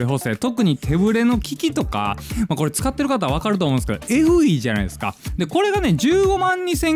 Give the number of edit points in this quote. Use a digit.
1